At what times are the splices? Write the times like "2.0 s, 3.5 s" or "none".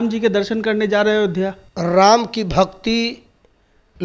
1.7 s